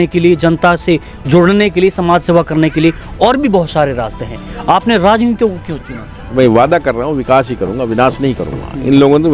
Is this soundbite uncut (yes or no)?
no